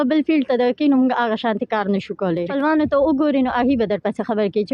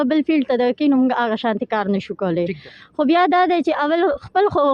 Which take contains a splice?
first; 1 cut; at 2.5 s

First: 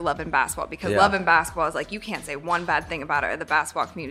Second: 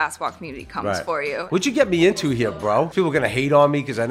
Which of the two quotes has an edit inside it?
second; 2 cuts; at 1.5 s, 2.9 s

